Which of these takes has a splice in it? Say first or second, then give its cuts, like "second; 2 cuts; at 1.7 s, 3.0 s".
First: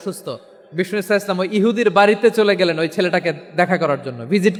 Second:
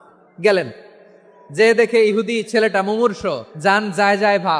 second; 1 cut; at 3.5 s